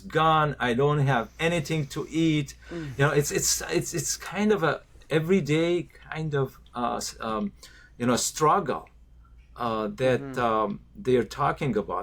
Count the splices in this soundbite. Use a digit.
0